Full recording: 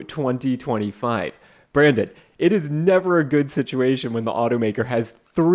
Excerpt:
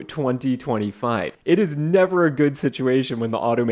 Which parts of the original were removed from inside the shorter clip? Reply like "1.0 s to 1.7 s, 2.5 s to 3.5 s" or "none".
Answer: 1.3 s to 2.3 s